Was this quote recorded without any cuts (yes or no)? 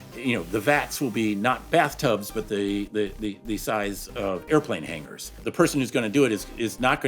no